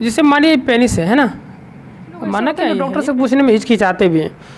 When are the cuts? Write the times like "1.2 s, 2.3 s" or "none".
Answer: 2.8 s